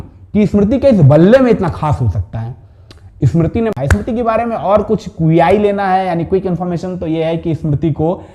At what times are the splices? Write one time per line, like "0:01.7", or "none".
0:03.7